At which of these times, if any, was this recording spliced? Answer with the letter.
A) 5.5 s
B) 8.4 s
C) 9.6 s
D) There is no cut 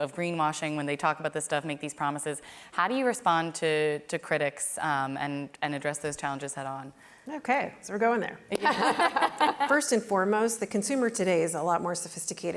C